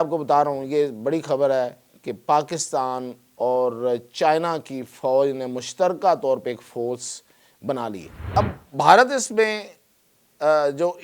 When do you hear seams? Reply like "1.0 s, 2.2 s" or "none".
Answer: 8.2 s